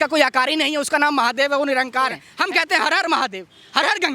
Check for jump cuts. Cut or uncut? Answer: cut